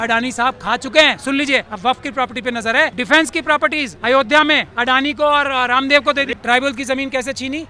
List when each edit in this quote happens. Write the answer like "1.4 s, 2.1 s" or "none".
1.7 s, 3.0 s, 3.9 s, 4.7 s, 6.3 s